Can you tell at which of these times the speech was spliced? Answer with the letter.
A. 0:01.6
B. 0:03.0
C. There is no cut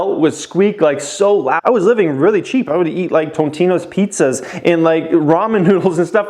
A